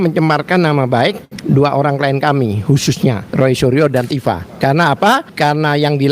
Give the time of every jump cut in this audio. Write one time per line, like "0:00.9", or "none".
0:01.3
0:03.2
0:04.5
0:05.3